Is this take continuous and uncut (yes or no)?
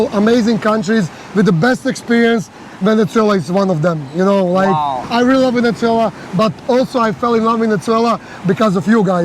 yes